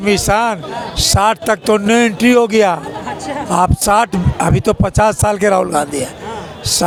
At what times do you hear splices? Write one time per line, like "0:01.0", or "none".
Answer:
none